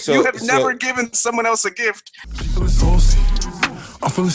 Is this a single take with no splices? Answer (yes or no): no